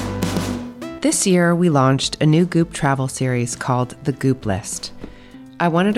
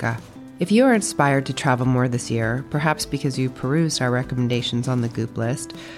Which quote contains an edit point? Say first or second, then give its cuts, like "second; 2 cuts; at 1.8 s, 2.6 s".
first; 1 cut; at 0.9 s